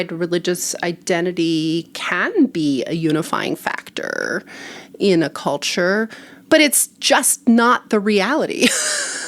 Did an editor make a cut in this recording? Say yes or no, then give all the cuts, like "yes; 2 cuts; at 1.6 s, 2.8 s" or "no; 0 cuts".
yes; 1 cut; at 6.3 s